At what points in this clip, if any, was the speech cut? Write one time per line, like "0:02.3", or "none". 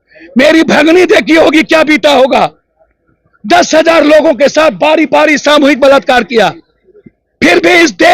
none